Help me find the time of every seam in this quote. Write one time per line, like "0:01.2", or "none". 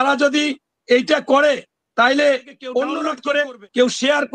0:03.1

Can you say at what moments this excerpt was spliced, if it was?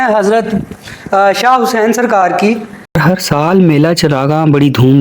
0:03.0

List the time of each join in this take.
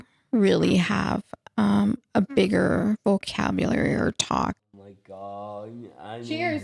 0:04.6

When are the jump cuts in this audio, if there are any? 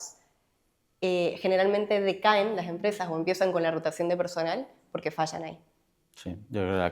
none

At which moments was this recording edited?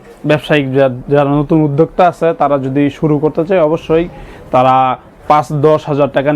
none

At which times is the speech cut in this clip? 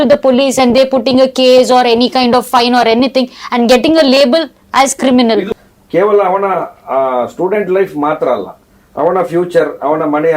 0:05.5

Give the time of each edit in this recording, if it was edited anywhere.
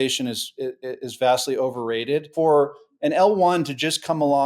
0:02.3

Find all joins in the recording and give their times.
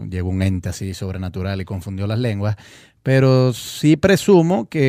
0:01.3

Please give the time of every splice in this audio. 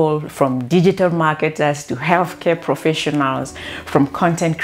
none

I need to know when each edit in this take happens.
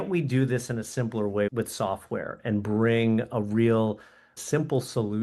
0:01.5
0:04.4

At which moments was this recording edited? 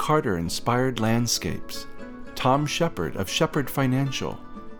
none

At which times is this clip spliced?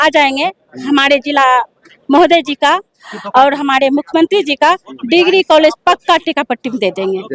none

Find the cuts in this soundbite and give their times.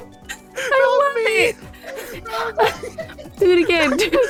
none

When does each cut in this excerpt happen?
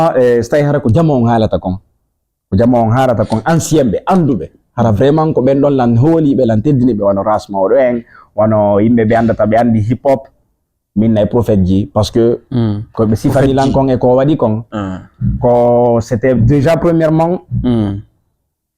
none

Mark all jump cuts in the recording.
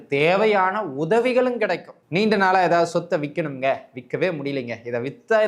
0:01.9

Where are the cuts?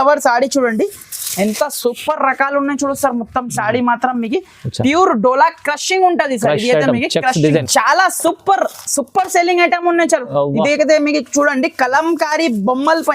0:07.6

